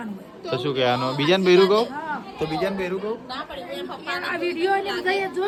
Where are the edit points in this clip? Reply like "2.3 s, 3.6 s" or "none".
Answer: none